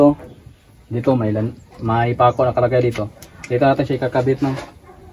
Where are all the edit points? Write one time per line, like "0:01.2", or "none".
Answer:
none